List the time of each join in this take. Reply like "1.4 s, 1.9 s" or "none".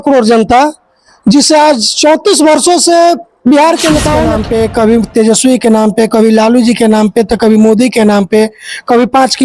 4.2 s